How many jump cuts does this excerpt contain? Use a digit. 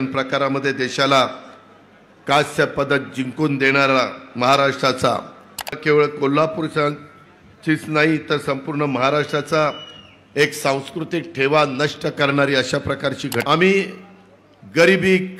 2